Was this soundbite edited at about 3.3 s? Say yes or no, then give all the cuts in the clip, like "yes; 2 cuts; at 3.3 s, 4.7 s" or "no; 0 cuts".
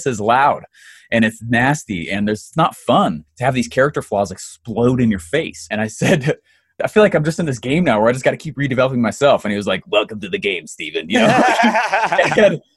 yes; 4 cuts; at 2.5 s, 3.3 s, 5.7 s, 6.8 s